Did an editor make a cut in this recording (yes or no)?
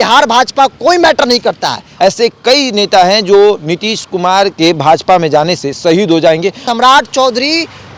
yes